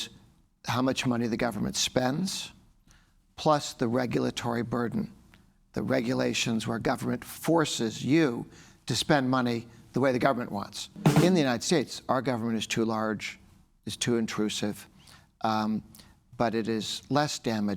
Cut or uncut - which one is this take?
cut